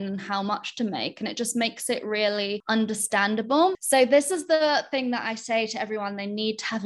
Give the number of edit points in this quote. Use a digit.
2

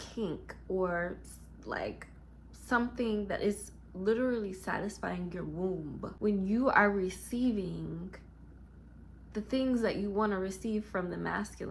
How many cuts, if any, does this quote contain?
1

